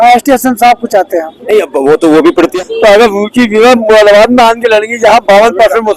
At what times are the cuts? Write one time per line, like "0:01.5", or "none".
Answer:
0:02.5